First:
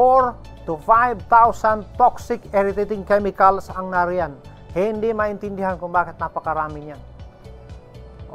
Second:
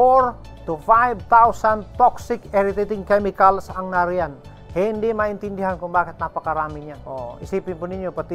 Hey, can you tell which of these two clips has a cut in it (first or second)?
second